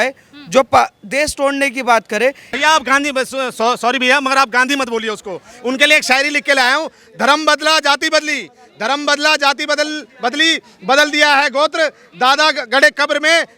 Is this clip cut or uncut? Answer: cut